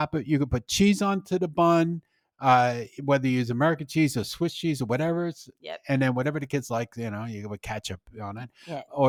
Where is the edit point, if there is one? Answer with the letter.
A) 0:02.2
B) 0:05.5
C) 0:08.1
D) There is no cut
D